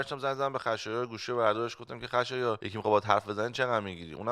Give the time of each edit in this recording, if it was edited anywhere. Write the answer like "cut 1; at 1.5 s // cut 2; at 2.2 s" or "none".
cut 1; at 2.7 s